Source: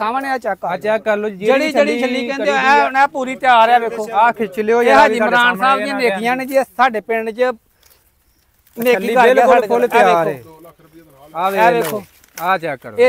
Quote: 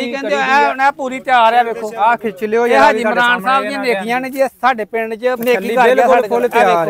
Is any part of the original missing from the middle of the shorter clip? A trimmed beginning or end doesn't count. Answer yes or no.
yes